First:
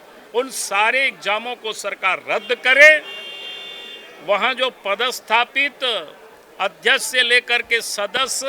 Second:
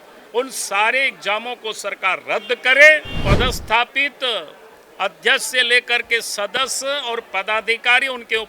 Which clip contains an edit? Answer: second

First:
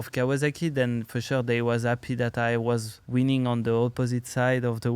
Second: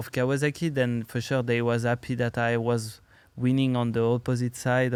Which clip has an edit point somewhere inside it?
first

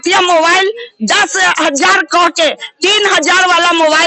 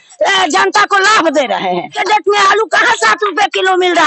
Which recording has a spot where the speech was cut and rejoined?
second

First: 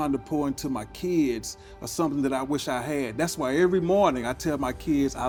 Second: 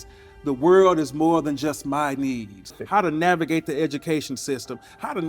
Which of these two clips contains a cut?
second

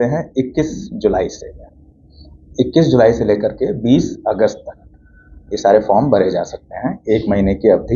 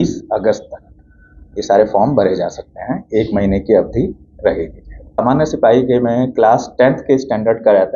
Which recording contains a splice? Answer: second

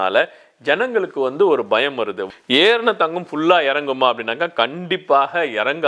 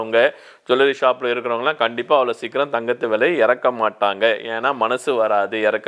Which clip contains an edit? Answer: first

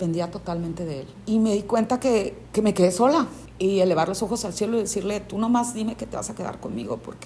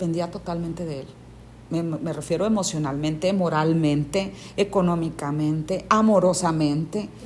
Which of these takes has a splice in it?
first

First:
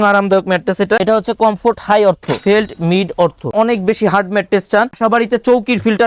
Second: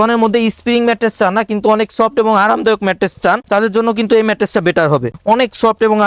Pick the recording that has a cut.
first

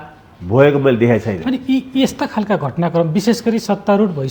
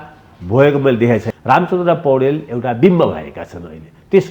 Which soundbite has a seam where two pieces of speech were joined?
second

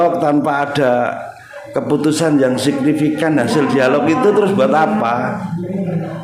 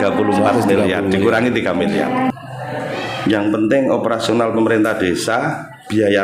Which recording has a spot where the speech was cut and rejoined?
second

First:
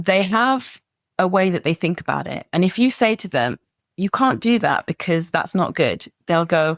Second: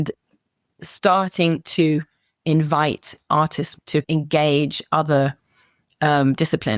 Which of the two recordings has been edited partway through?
second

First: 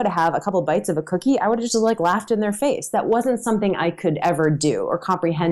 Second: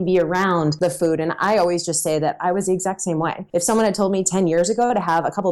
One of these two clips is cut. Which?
second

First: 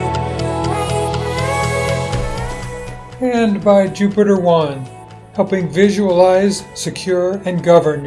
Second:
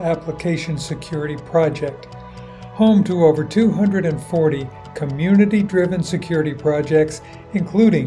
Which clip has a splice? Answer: first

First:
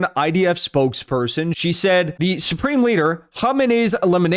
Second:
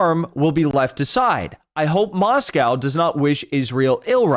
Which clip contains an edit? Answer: first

